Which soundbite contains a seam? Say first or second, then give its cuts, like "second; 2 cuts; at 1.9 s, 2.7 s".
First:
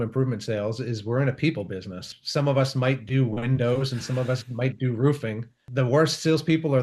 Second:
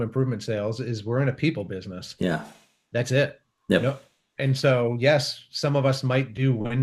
first; 2 cuts; at 2.1 s, 5.5 s